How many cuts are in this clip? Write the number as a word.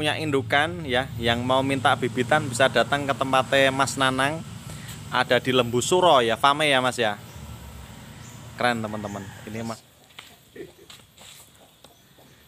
one